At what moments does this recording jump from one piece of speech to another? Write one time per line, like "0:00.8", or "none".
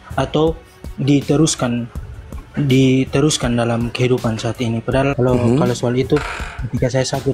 0:05.1